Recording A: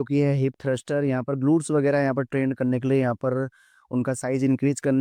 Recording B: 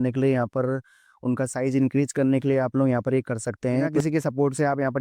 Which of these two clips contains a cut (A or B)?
B